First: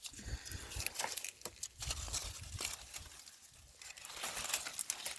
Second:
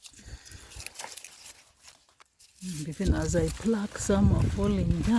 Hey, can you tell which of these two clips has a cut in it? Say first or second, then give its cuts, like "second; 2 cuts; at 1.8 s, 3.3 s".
second; 1 cut; at 1.4 s